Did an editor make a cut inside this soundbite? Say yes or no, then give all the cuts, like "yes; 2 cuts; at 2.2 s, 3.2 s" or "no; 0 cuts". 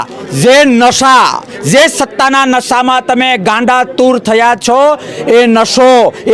no; 0 cuts